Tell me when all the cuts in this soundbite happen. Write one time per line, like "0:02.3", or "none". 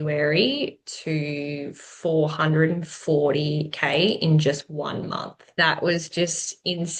0:05.4